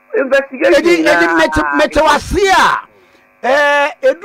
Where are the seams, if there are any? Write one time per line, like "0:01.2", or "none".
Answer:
0:01.5

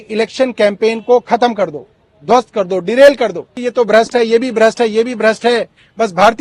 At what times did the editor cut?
0:03.6

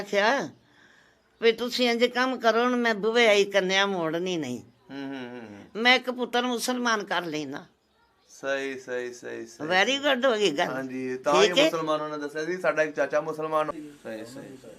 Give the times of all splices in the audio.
0:13.7

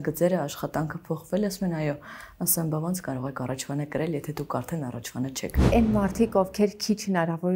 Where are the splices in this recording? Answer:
0:05.6

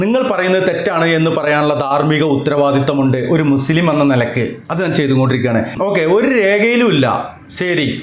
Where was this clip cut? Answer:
0:05.7

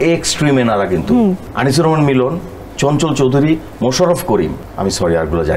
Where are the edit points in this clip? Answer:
0:01.5
0:04.6

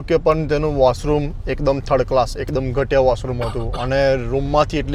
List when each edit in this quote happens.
none

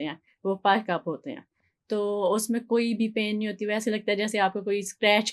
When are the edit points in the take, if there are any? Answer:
none

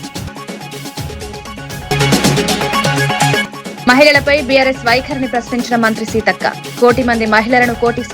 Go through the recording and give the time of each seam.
0:01.6

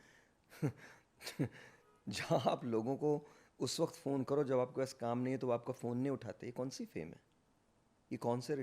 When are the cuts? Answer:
none

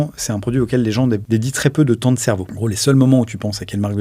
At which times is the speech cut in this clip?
0:01.2
0:02.5

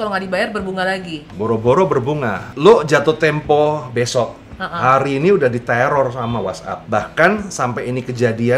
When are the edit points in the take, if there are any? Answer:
0:01.2
0:02.4
0:06.7

